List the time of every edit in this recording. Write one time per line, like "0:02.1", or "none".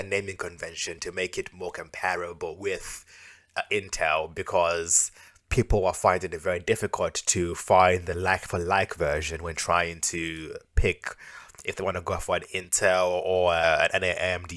0:13.6